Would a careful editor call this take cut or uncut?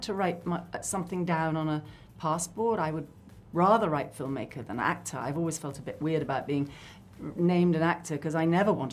uncut